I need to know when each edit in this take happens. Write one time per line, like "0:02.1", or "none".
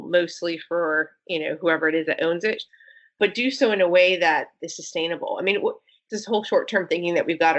0:02.7
0:06.0

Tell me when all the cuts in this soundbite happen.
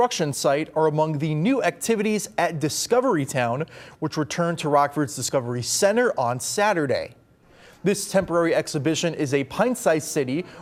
none

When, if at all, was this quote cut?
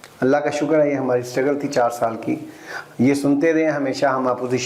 none

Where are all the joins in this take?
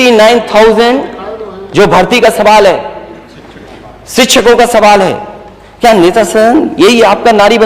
none

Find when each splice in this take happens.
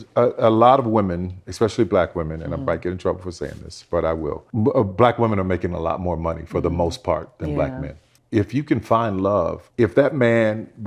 0:04.4
0:08.1
0:09.6

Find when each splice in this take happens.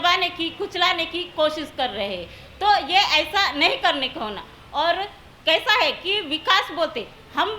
none

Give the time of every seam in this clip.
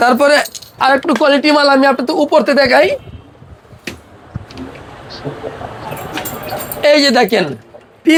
none

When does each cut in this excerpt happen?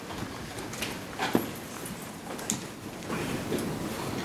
0:03.1

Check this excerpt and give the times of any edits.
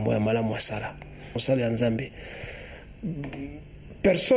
0:01.4

